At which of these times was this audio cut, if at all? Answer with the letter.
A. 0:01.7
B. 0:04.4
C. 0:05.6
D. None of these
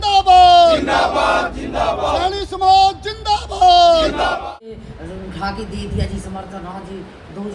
B